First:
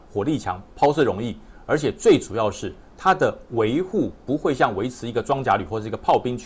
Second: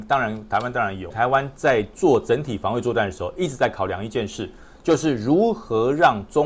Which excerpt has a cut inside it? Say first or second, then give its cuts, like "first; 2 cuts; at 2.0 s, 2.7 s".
second; 1 cut; at 1.1 s